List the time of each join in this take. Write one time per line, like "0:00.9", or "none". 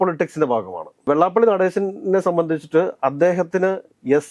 none